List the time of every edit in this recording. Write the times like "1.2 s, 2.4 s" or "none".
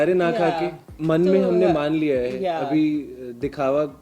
0.9 s